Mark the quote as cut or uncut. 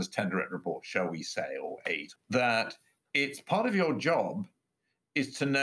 cut